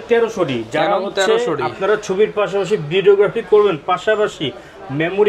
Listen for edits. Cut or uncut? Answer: uncut